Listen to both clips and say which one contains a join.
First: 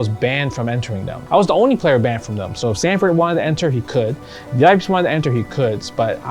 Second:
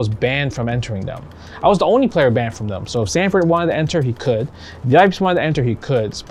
first; 1 cut; at 1.1 s

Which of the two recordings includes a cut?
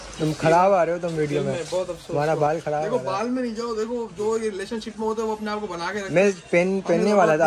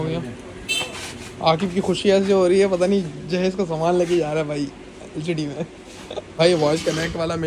second; 1 cut; at 6.4 s

